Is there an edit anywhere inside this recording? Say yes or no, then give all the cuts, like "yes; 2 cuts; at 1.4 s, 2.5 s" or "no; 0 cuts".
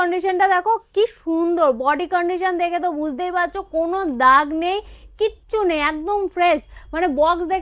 no; 0 cuts